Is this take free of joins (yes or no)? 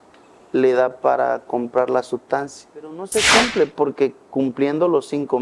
no